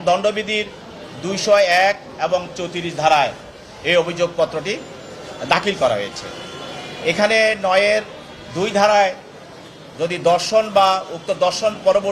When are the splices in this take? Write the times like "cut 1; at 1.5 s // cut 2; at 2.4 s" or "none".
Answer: none